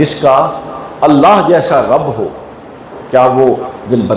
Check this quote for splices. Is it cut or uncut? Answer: uncut